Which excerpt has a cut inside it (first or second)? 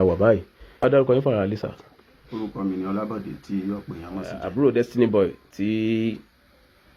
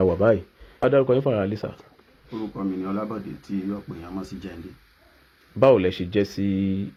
first